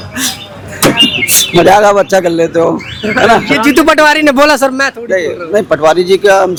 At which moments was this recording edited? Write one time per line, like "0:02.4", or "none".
none